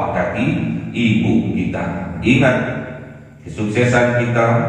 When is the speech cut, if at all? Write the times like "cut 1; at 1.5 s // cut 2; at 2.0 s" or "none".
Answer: cut 1; at 2.1 s